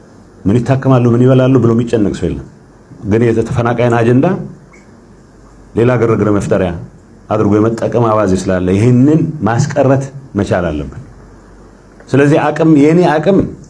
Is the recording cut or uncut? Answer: uncut